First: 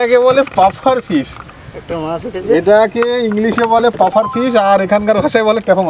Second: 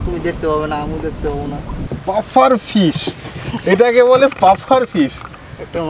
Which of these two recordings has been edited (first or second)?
second